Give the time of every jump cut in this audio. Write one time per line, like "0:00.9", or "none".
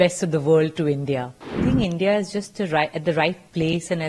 0:01.6